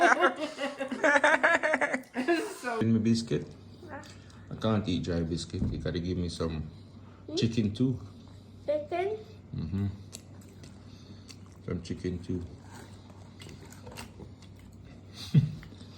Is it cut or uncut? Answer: cut